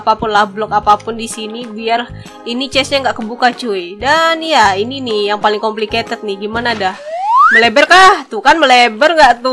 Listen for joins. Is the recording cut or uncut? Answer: uncut